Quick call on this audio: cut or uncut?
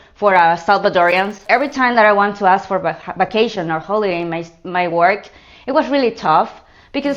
cut